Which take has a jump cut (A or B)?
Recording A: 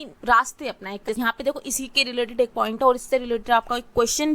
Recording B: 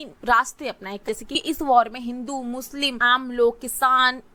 A